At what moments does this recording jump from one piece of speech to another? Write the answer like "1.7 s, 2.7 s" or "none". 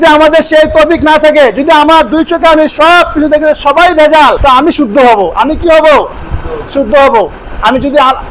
4.4 s